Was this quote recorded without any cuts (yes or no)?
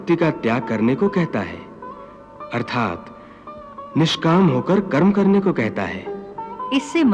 yes